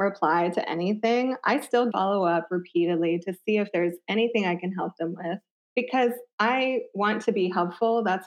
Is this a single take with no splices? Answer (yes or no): no